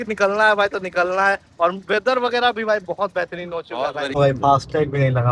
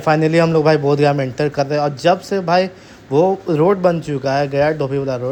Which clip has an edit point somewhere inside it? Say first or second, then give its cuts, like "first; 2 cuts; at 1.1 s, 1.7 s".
first; 1 cut; at 4.1 s